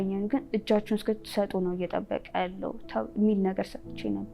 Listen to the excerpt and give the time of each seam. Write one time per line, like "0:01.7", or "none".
none